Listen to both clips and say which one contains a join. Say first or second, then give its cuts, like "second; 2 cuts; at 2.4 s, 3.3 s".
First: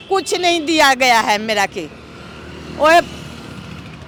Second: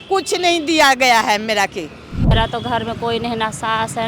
second; 1 cut; at 2.3 s